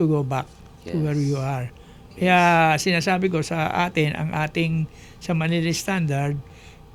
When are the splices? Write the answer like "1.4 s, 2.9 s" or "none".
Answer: none